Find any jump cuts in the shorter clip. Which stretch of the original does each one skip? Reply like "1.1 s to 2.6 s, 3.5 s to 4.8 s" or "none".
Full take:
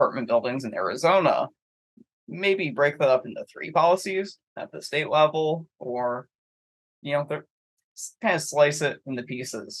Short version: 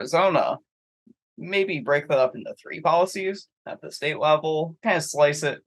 5.6 s to 8.1 s